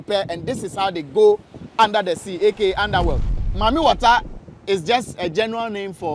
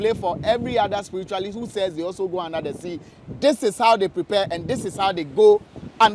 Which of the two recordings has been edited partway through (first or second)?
first